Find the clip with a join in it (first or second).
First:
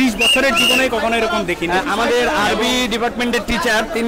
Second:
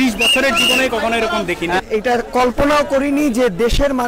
second